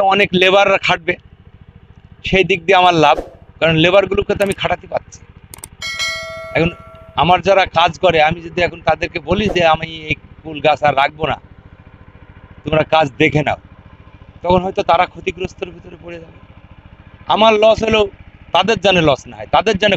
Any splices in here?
no; 0 cuts

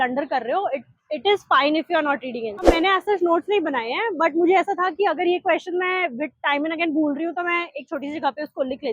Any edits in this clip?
yes; 1 cut; at 2.6 s

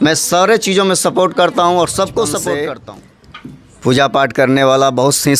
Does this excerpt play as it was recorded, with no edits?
no; 1 cut; at 2.7 s

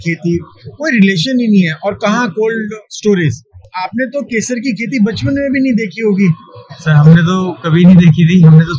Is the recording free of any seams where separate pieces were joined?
yes; 0 cuts

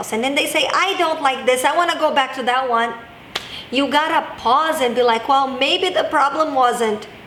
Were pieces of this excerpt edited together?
no; 0 cuts

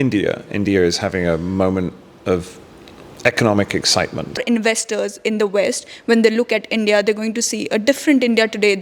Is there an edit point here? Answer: yes; 1 cut; at 4.4 s

